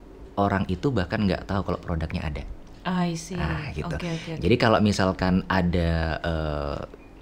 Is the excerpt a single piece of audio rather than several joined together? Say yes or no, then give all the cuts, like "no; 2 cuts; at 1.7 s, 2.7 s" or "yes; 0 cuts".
yes; 0 cuts